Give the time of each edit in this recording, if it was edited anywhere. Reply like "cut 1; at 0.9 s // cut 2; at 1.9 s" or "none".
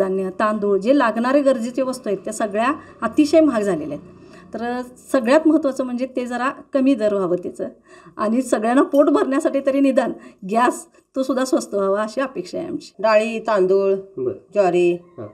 cut 1; at 12.8 s